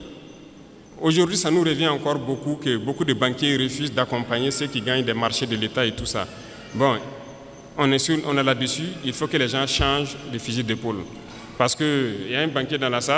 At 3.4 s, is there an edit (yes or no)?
no